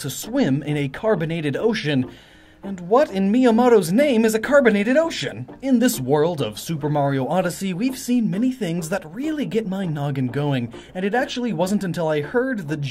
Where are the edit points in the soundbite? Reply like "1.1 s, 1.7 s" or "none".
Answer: 7.6 s